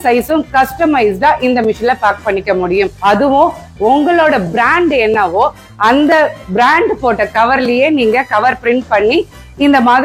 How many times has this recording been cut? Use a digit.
0